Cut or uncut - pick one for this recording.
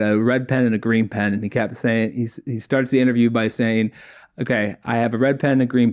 uncut